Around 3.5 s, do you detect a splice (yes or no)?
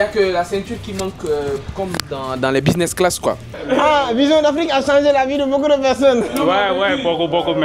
yes